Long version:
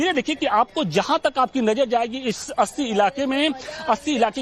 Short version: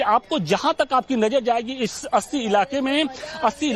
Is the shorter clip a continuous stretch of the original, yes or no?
yes